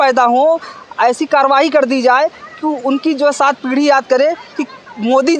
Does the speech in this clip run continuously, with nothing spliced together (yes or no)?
yes